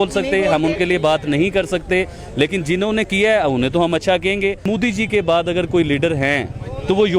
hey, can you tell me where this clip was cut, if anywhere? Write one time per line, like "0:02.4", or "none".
0:04.7